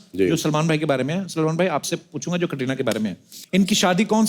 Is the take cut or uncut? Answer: cut